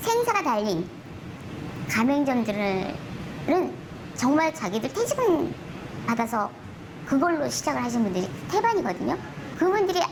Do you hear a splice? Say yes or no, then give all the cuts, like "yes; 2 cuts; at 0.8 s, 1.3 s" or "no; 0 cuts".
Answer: no; 0 cuts